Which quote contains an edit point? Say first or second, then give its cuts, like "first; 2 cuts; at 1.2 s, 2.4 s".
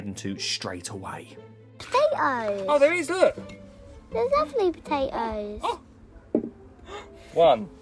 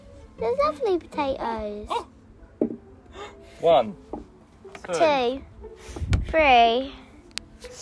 first; 1 cut; at 1.8 s